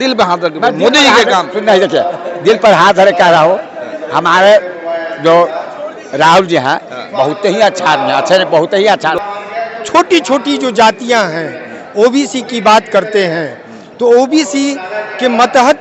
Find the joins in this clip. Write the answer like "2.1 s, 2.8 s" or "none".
9.3 s